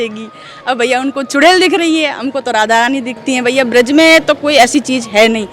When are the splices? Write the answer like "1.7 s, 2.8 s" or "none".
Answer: none